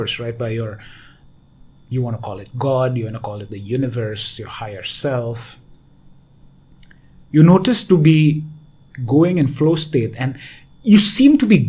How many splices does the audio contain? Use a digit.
0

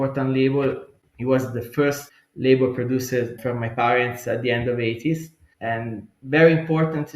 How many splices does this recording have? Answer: 1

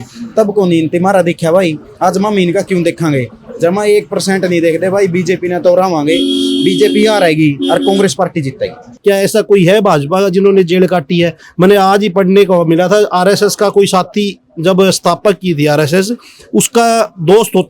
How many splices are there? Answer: 1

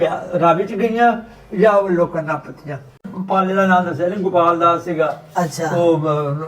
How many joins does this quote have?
1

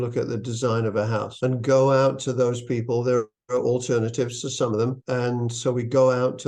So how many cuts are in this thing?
0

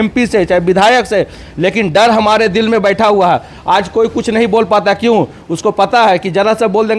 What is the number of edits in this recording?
0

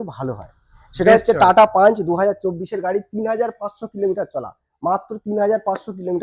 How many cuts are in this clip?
0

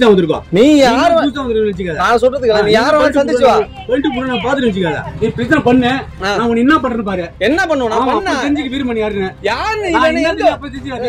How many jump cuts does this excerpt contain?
1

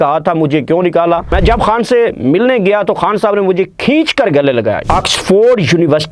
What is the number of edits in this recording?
2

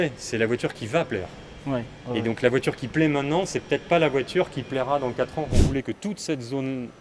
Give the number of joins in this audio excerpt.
1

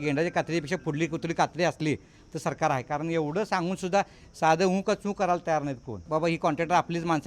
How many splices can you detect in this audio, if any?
1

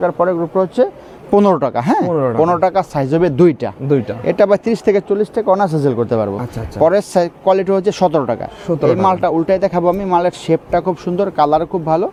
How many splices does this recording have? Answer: 0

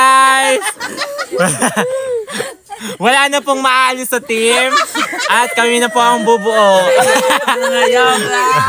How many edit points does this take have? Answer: 0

